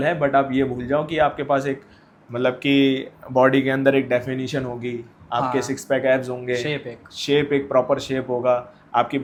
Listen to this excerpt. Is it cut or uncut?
uncut